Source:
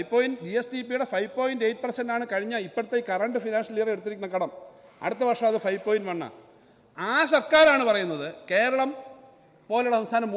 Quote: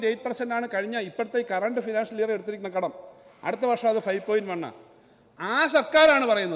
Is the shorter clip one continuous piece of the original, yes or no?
yes